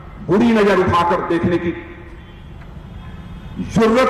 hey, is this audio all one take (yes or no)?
yes